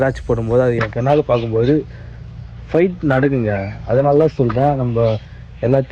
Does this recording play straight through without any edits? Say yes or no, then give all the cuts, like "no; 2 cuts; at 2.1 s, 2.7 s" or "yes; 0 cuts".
yes; 0 cuts